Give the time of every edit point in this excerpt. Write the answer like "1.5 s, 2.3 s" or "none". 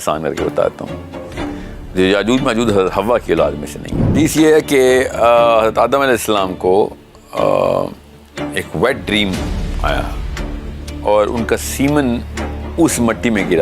4.1 s